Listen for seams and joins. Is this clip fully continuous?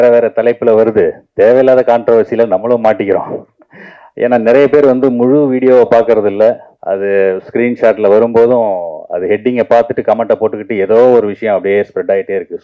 no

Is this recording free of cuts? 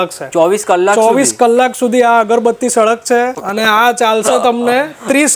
no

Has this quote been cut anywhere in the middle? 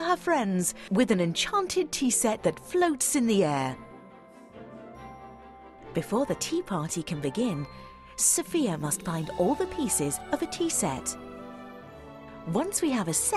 no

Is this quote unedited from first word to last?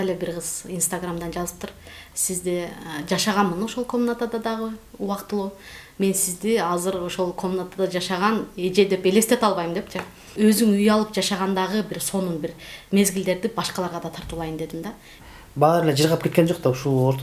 no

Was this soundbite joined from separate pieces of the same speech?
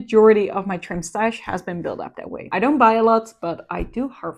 no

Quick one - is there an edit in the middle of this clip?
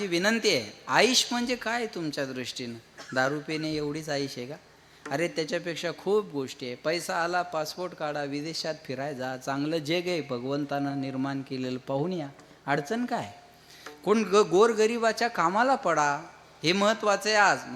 no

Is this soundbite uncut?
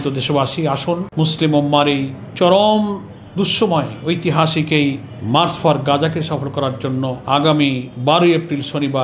no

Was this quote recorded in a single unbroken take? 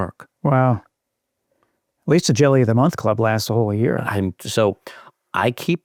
yes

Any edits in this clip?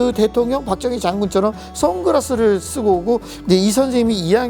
no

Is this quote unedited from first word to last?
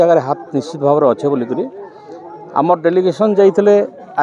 yes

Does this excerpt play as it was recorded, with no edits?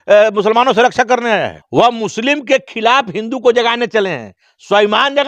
no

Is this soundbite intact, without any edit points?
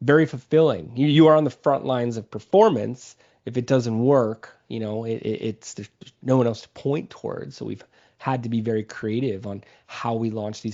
yes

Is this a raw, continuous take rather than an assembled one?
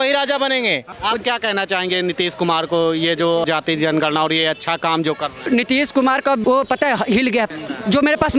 no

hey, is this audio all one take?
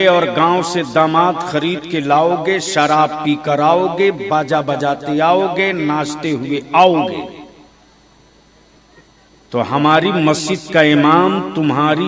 yes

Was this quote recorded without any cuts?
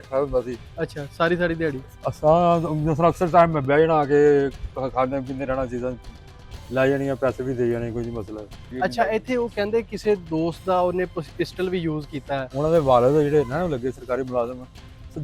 no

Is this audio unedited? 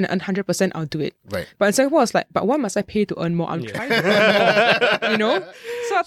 yes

